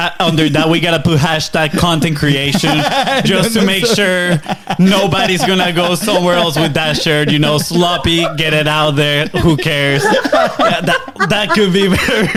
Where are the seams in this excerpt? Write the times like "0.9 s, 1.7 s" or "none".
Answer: none